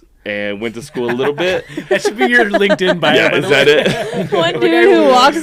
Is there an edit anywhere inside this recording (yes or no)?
no